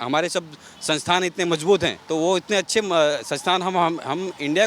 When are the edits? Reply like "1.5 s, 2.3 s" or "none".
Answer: 2.0 s